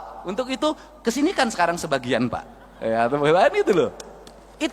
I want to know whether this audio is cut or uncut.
uncut